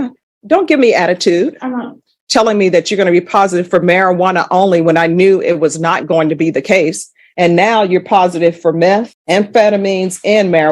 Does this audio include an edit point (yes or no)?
yes